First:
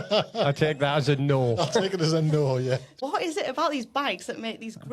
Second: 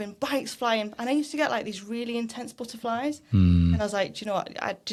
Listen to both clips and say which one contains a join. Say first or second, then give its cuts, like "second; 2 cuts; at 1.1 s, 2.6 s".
first; 1 cut; at 2.9 s